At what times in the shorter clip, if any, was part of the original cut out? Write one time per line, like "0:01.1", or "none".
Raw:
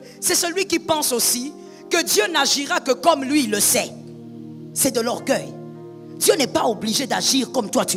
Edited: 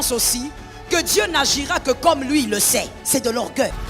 0:03.0